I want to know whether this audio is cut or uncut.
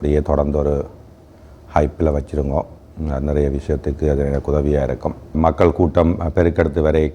cut